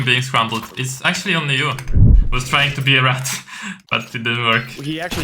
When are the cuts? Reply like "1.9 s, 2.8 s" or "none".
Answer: 2.2 s